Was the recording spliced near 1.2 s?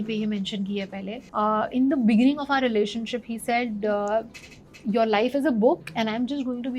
yes; 1 cut; at 1.2 s

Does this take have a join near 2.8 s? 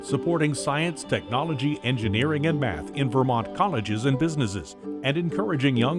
no; 0 cuts

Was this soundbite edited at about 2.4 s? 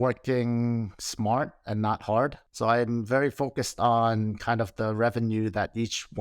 yes; 1 cut; at 2.4 s

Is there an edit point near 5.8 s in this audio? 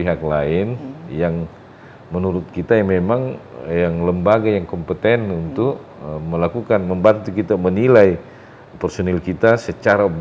no; 0 cuts

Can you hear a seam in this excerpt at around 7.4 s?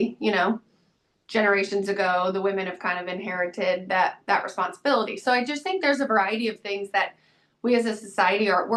no; 0 cuts

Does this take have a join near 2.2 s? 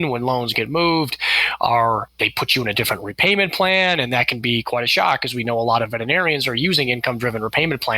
yes; 1 cut; at 2.2 s

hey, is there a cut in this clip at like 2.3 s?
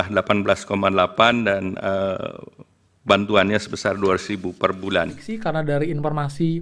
no; 1 cut; at 5.3 s

